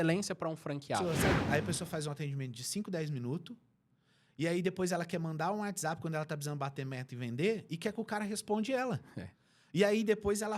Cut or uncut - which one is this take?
cut